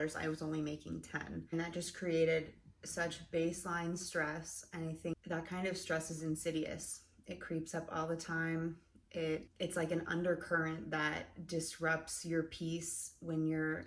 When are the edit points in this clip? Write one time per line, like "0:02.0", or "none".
0:01.5
0:05.1
0:09.5